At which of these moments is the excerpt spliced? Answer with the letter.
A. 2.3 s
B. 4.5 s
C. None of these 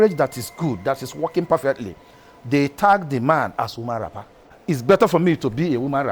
B